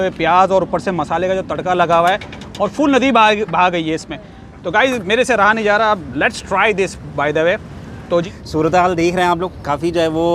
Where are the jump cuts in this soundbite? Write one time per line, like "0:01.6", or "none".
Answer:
0:08.2